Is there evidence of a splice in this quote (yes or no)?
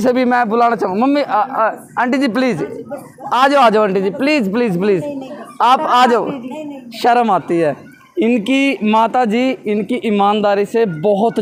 no